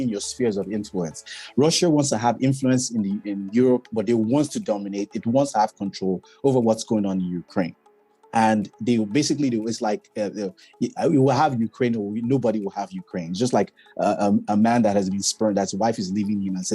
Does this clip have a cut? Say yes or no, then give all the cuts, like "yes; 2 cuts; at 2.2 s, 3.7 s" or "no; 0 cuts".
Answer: no; 0 cuts